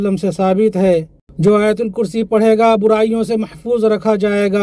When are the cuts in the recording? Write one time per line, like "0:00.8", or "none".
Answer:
0:01.1